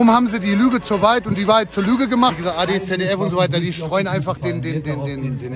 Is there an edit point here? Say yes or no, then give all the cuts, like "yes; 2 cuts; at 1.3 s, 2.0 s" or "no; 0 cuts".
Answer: yes; 1 cut; at 2.4 s